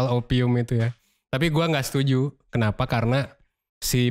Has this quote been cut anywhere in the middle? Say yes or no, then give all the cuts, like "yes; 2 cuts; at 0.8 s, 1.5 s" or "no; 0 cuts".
no; 0 cuts